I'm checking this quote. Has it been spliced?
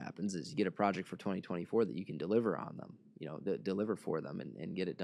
no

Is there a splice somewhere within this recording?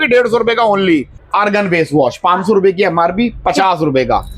yes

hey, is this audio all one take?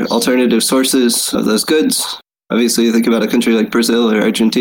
yes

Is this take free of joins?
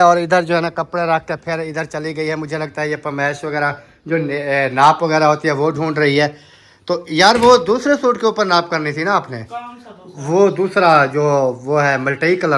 yes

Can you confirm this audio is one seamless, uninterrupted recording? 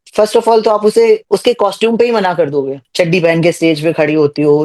no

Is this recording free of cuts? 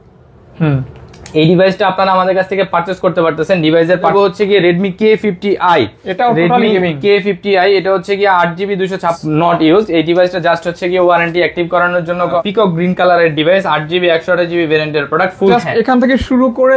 no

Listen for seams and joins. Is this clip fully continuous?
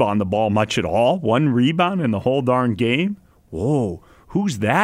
yes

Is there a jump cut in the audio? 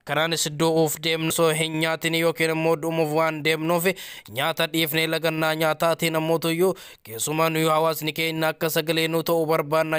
yes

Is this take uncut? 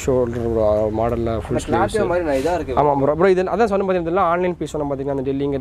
yes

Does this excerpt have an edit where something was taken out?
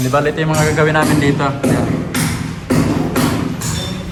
no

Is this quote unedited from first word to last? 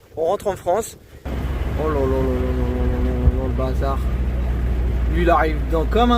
no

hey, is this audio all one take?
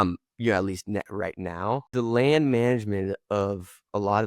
no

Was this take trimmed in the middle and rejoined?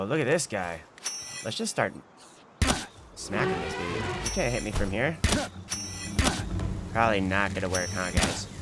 yes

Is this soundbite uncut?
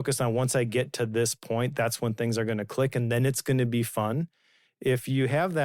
yes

